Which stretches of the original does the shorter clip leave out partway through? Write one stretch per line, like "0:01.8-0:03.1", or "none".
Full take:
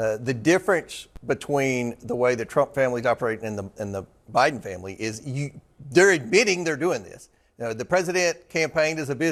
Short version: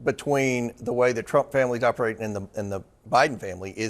none